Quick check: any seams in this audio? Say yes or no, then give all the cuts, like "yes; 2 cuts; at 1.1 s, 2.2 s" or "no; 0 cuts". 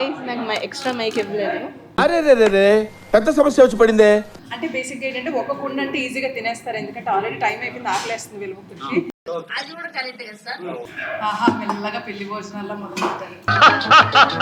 yes; 2 cuts; at 4.4 s, 10.8 s